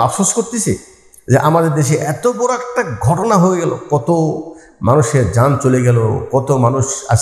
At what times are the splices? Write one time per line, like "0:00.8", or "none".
none